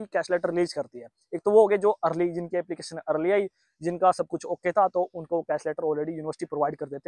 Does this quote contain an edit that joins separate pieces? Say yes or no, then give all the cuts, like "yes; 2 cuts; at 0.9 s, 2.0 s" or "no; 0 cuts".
no; 0 cuts